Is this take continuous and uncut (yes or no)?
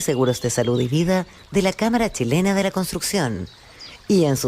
no